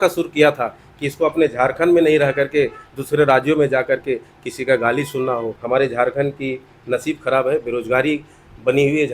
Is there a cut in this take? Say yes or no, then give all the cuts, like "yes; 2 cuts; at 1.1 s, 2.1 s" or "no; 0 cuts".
yes; 1 cut; at 5.6 s